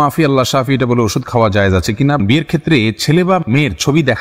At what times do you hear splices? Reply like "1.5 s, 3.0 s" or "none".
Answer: 2.2 s